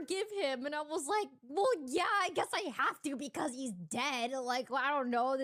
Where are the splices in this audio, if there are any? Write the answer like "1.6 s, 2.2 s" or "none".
none